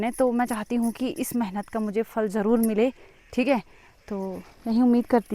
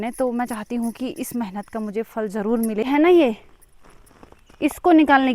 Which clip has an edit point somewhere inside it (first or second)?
second